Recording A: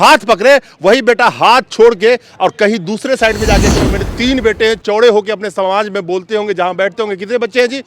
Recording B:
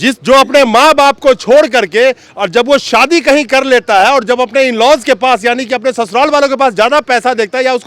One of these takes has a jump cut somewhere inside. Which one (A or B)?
A